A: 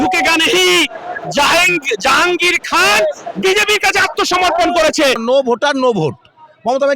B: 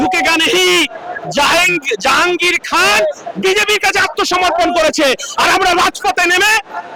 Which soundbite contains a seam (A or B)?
A